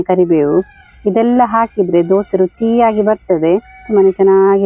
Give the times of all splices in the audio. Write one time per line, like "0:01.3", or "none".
0:03.8

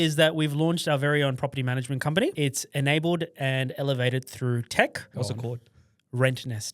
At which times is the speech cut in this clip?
0:02.3
0:05.1

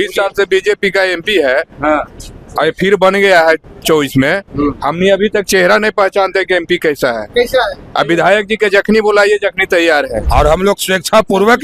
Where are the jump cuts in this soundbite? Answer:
0:10.2

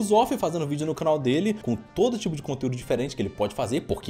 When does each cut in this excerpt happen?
0:01.6

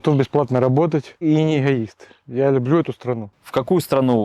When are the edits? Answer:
0:01.2
0:03.3

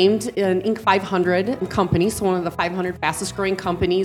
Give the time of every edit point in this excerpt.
0:01.7

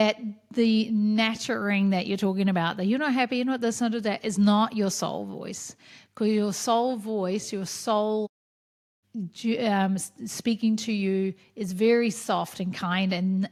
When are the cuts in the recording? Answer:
none

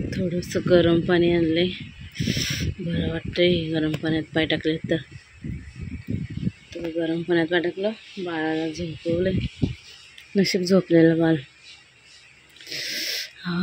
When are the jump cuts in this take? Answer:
none

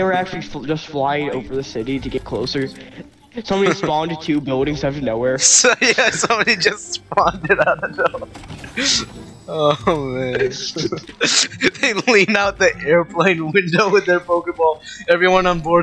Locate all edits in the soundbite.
0:11.1

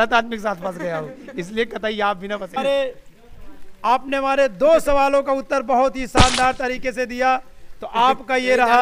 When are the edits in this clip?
0:02.6

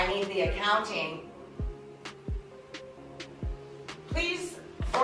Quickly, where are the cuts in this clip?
none

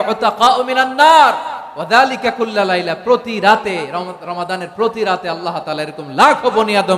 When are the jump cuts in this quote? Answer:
none

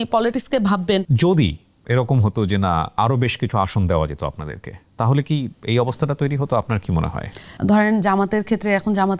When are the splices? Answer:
0:01.1
0:07.4

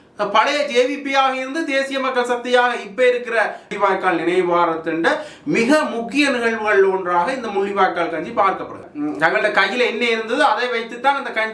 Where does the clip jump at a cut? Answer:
0:03.7
0:08.9

